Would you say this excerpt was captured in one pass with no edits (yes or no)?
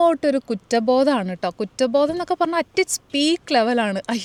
yes